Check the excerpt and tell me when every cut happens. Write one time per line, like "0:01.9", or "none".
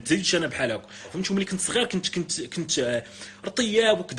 0:01.1